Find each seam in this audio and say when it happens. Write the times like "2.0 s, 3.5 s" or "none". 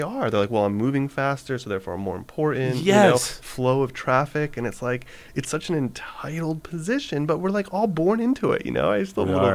none